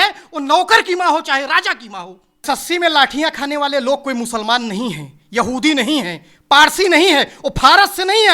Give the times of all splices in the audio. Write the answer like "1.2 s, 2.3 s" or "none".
2.4 s

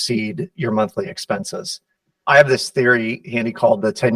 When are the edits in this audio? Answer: 2.2 s

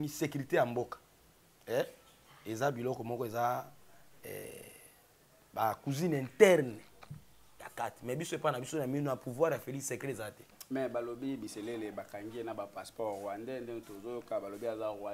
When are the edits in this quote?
10.6 s

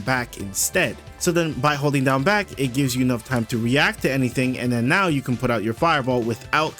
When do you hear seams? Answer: 1.1 s

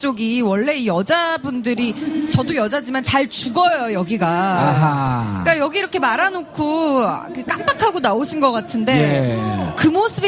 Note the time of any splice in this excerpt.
2.4 s

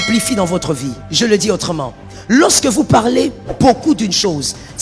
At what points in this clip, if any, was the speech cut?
1.0 s

